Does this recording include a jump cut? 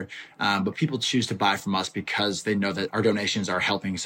yes; 1 cut; at 2.9 s

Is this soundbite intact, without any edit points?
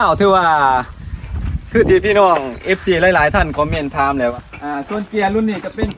no; 1 cut; at 4.3 s

